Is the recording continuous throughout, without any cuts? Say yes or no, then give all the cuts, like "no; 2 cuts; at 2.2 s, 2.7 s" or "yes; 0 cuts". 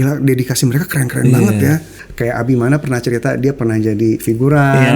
no; 1 cut; at 1.9 s